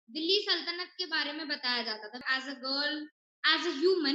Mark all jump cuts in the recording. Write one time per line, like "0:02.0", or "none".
0:02.2